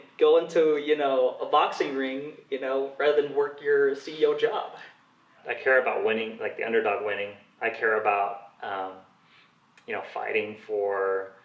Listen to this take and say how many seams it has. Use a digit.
1